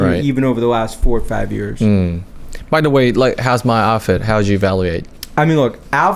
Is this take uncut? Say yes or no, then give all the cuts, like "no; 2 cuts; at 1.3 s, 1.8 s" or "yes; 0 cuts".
yes; 0 cuts